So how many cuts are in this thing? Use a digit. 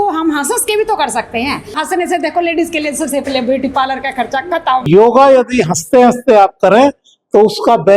2